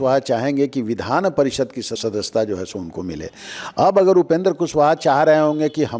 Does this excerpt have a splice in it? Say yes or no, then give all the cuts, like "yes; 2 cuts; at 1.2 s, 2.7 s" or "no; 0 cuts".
yes; 1 cut; at 2.0 s